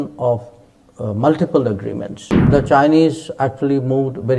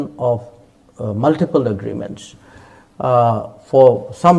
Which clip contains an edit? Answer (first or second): first